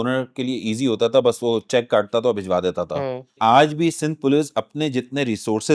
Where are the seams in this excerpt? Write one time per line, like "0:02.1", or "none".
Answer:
0:03.4